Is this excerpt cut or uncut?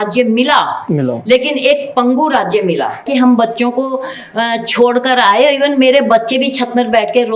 cut